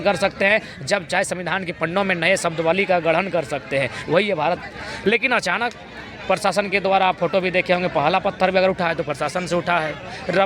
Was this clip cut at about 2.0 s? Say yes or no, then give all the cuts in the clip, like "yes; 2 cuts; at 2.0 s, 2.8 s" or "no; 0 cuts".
no; 1 cut; at 4.6 s